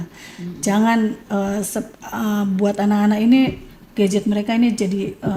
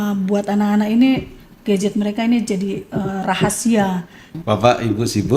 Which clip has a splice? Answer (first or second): second